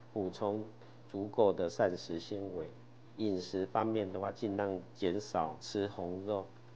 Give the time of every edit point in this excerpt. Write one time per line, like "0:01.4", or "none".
0:03.0
0:05.6